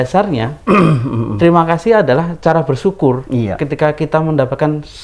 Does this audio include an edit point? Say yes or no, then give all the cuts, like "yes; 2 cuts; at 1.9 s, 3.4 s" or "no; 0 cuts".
no; 0 cuts